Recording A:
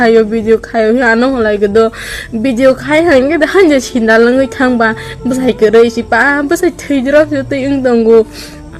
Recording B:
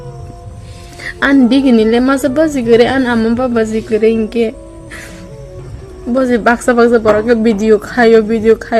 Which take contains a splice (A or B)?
B